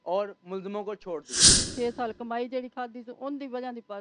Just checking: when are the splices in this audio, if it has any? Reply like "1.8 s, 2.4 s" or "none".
1.7 s